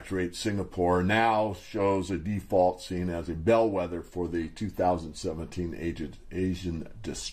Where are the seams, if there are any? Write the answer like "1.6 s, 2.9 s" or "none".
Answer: 2.4 s